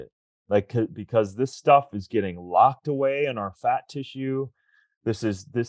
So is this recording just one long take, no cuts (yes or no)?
yes